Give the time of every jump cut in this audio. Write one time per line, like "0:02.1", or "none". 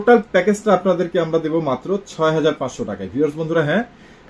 none